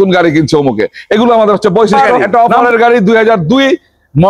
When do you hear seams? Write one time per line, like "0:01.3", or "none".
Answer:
0:01.9

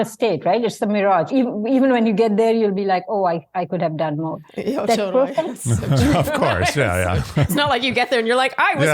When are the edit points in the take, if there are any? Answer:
0:01.3

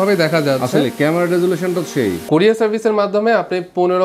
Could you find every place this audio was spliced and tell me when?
0:02.2

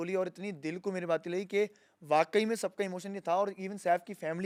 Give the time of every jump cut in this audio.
none

